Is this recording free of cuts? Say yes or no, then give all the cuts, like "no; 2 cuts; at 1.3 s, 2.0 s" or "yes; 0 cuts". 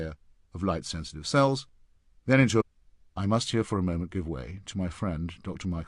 yes; 0 cuts